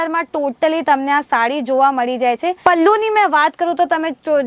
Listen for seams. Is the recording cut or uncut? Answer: cut